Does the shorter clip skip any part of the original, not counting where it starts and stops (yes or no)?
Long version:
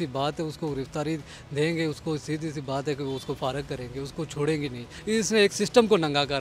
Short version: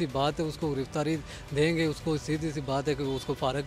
no